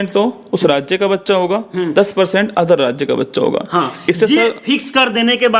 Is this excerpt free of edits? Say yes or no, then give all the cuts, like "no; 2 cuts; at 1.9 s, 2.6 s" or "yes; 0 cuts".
yes; 0 cuts